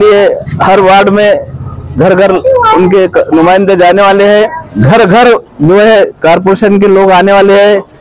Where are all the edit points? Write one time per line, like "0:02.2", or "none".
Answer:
0:04.6

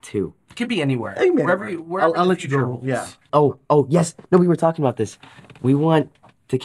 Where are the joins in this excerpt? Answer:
0:03.3

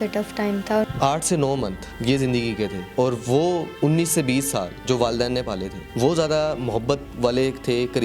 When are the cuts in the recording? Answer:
0:00.8
0:01.9
0:02.8
0:03.7
0:04.7
0:05.8
0:07.1

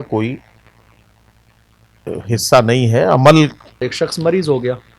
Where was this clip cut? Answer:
0:03.8

